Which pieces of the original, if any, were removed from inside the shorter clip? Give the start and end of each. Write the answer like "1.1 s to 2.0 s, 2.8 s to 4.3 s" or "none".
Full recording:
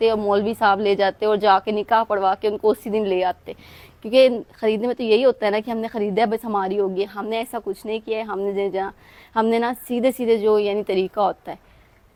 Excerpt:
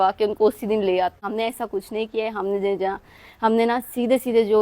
3.5 s to 7.2 s

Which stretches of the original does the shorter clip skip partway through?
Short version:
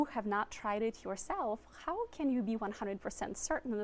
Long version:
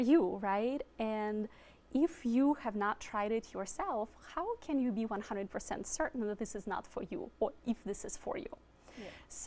none

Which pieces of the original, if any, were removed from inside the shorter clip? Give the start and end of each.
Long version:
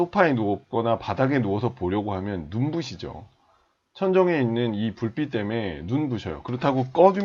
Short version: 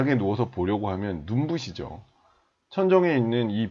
none

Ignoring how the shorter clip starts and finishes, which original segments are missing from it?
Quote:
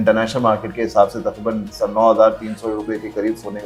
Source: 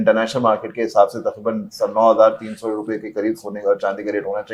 none

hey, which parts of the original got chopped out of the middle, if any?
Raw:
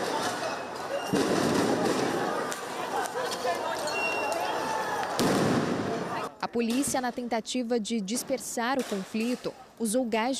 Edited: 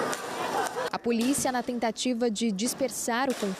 3.3 s to 6.4 s

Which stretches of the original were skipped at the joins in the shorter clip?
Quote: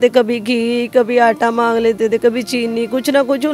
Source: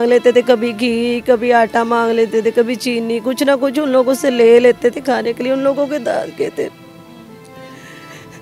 none

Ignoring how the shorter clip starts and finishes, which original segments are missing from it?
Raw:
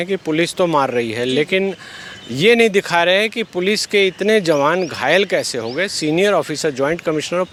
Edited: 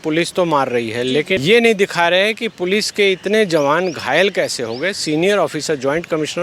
1.6 s to 2.3 s

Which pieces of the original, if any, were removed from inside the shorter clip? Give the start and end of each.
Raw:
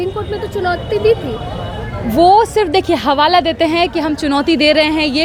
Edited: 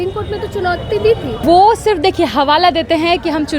1.4 s to 2.1 s

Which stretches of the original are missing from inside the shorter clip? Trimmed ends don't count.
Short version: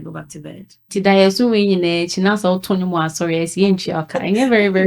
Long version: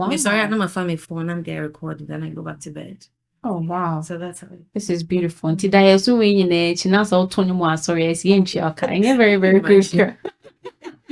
3.2 s to 5.6 s

